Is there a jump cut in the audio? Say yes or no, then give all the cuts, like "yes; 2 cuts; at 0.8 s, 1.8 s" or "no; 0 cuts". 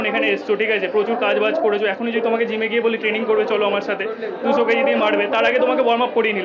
no; 0 cuts